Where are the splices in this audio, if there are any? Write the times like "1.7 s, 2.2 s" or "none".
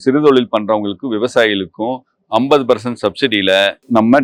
none